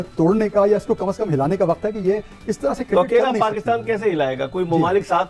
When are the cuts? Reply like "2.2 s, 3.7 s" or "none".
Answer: none